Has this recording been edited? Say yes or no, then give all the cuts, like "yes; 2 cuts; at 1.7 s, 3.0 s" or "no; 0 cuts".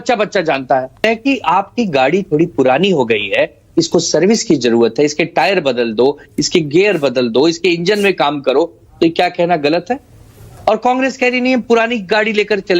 yes; 2 cuts; at 1.0 s, 8.9 s